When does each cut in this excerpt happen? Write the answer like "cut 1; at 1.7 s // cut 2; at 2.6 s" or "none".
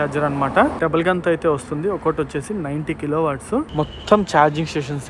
cut 1; at 3.7 s